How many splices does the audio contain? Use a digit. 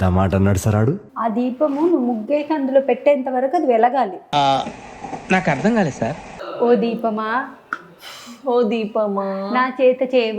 2